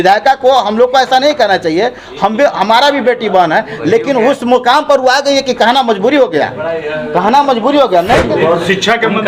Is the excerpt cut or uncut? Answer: cut